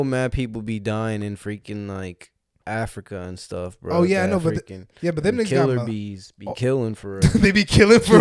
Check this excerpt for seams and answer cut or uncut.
uncut